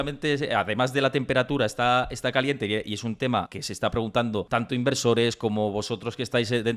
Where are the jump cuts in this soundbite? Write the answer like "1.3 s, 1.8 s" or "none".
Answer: none